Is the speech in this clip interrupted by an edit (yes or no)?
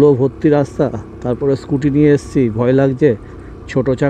no